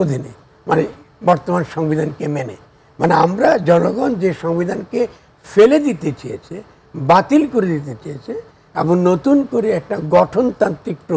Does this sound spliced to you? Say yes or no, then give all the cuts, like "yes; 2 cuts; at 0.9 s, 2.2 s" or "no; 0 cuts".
no; 0 cuts